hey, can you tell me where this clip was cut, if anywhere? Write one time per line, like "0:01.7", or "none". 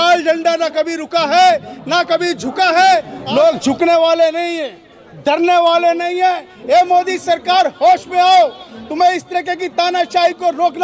0:03.2

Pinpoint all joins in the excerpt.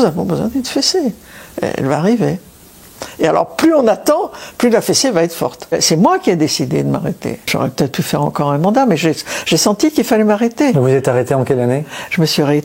0:05.7
0:07.5

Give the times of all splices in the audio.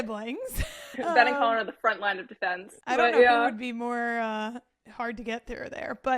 0:00.9
0:02.8

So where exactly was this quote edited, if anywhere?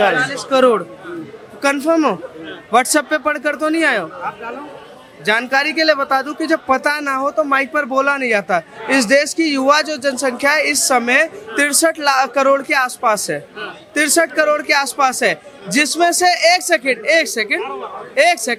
none

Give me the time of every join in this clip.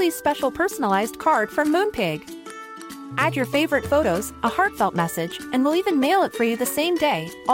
none

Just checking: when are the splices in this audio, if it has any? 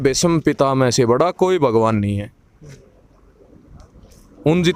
none

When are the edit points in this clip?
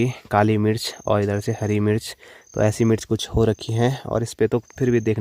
none

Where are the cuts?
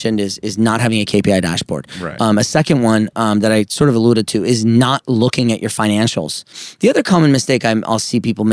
0:06.6

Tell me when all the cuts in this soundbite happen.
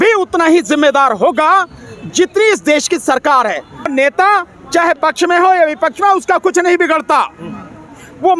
0:03.9

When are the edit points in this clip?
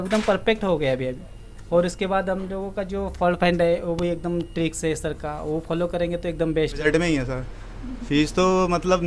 0:06.8

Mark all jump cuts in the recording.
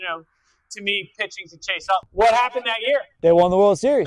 0:02.1
0:03.1

